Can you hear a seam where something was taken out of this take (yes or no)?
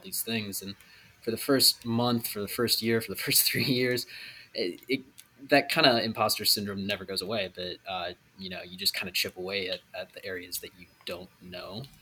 no